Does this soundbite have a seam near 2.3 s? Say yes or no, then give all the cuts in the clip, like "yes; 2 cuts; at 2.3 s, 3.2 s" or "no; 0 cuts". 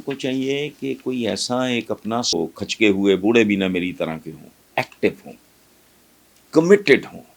yes; 1 cut; at 2.3 s